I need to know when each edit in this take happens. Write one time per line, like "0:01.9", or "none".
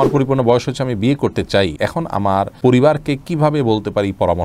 0:02.2